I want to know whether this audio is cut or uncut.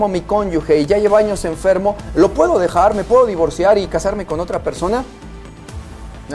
uncut